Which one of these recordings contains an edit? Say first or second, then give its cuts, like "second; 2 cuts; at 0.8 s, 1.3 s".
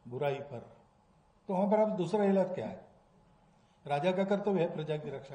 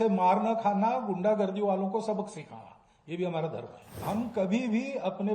second; 1 cut; at 4.0 s